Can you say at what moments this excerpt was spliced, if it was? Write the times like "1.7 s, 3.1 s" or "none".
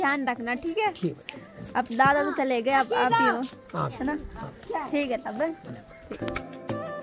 none